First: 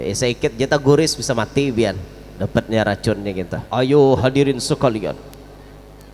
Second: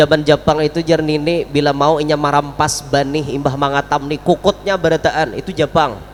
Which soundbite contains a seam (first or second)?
first